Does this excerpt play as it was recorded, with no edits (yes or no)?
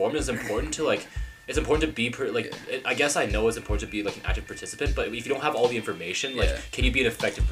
yes